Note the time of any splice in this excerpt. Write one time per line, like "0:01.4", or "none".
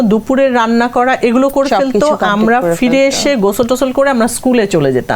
none